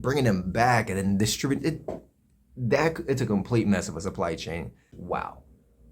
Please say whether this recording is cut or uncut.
cut